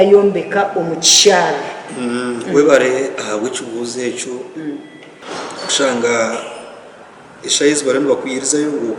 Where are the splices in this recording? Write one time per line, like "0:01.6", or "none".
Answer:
0:05.1